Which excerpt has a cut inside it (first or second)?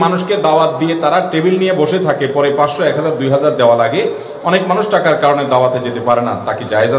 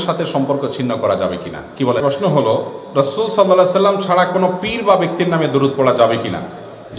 second